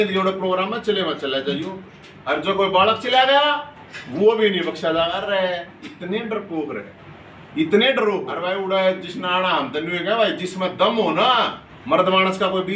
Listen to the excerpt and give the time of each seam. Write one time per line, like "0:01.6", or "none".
0:08.3